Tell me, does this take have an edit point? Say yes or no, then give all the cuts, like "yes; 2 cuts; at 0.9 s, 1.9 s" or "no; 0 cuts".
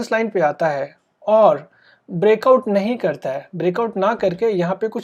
no; 0 cuts